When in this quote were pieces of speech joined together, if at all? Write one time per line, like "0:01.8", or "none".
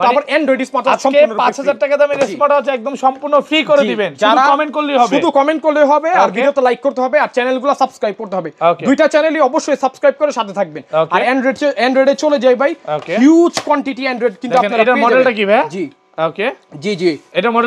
none